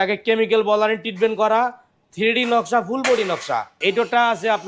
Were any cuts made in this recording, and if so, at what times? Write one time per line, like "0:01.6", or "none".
0:03.7